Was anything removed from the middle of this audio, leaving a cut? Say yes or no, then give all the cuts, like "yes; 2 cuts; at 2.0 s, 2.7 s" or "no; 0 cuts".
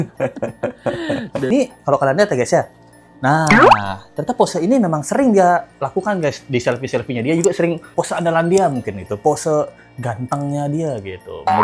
yes; 2 cuts; at 1.5 s, 7.8 s